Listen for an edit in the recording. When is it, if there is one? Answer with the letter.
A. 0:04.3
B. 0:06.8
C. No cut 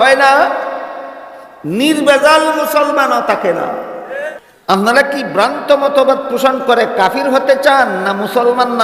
A